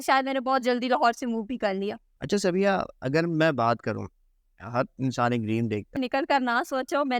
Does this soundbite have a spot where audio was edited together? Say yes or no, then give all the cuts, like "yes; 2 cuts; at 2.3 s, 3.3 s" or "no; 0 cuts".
yes; 2 cuts; at 2.1 s, 6.0 s